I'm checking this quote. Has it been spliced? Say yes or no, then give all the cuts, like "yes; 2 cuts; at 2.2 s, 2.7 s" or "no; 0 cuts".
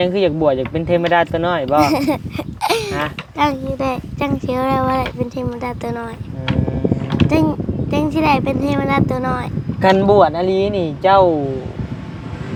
no; 0 cuts